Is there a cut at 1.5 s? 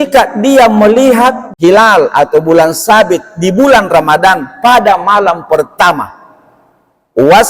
yes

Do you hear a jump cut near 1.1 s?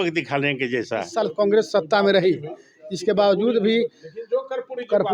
yes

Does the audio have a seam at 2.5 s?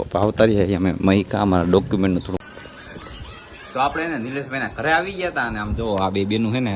yes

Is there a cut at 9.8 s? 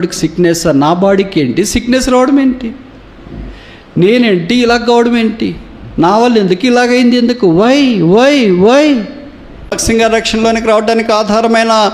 yes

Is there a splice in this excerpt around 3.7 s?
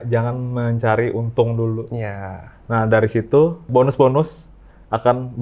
yes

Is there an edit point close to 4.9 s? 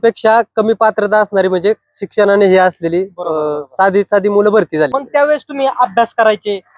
yes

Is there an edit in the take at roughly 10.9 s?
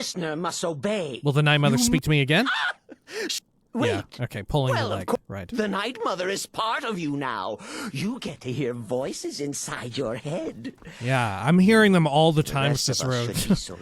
yes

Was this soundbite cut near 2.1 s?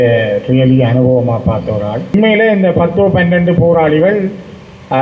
yes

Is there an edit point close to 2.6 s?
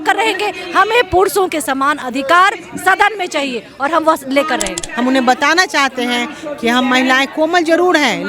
no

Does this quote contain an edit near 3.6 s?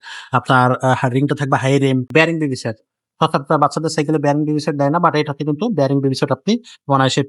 no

